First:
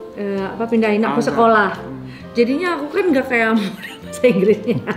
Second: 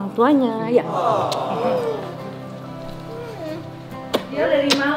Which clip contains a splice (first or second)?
second